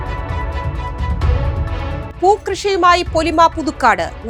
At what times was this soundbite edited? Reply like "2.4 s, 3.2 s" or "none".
2.1 s